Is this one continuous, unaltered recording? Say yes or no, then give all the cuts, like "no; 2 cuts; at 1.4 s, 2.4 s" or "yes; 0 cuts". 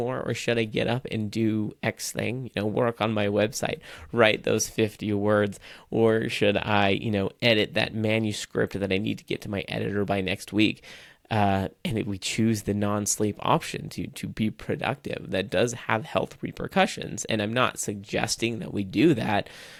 yes; 0 cuts